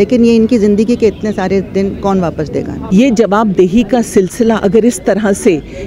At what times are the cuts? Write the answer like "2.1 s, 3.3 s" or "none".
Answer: 2.8 s